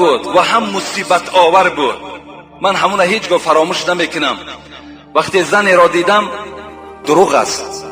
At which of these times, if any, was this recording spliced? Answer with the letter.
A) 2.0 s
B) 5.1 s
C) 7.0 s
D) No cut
C